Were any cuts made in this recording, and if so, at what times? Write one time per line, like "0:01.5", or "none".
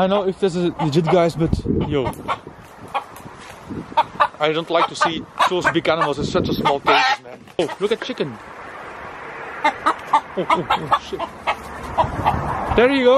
0:07.6

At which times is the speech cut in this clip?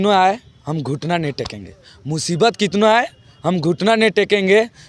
none

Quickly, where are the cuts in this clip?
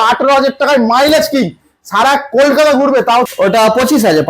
0:03.3

